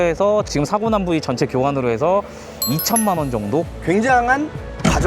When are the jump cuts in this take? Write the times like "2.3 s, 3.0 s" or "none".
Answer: 3.7 s